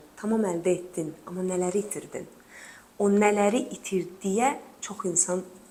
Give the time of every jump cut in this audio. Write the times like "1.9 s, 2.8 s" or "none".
none